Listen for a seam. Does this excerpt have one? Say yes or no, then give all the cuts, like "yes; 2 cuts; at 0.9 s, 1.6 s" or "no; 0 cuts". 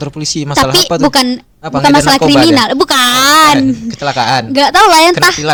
no; 0 cuts